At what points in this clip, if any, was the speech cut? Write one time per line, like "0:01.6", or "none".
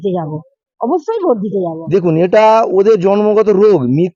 0:01.8

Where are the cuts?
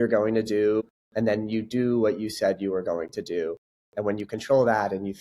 0:01.0

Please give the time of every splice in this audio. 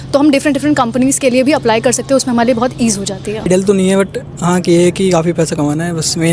0:03.5

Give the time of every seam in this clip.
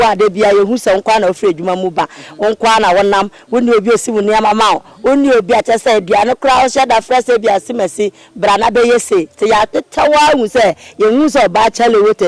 none

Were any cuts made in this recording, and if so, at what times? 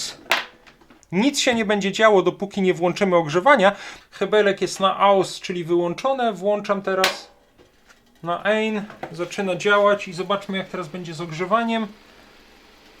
0:01.0
0:03.9

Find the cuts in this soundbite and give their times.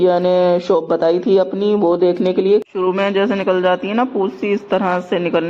0:02.6
0:04.4

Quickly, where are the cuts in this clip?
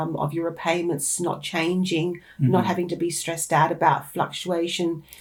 none

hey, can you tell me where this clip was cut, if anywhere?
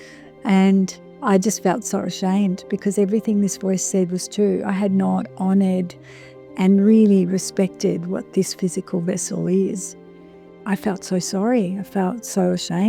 0:10.6

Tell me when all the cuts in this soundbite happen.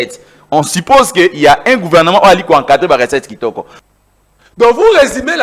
0:03.8

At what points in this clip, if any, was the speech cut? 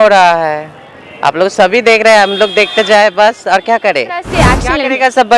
0:04.3

